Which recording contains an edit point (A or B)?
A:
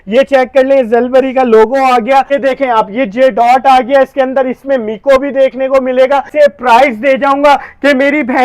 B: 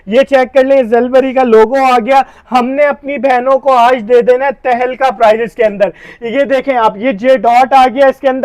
A